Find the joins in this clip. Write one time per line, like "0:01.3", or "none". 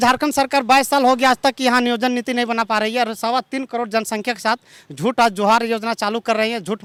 none